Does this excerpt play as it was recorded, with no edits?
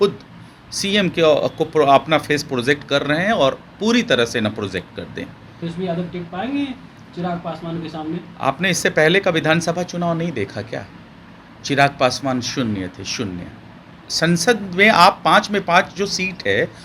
no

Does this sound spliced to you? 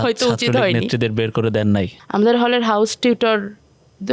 yes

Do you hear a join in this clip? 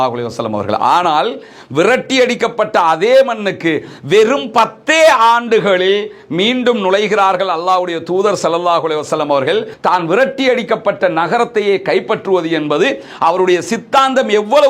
yes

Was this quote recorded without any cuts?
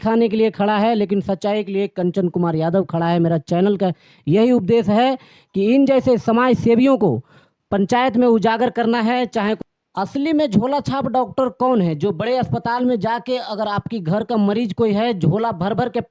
no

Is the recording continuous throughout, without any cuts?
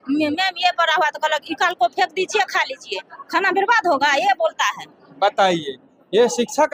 yes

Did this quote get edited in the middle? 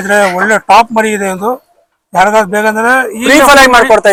no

